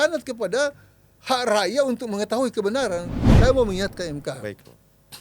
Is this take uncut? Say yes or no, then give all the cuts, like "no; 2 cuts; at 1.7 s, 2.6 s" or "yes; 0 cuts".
no; 1 cut; at 3.2 s